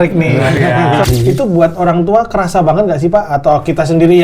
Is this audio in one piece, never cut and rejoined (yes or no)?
no